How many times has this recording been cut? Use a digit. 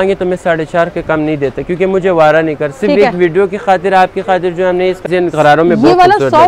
1